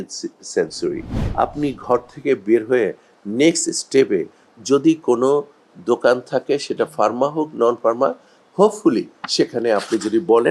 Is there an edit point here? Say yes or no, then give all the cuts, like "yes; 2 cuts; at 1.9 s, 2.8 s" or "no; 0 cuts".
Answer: yes; 1 cut; at 1.2 s